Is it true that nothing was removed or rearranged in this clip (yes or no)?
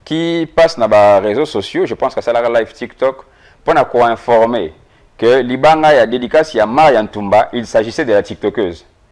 yes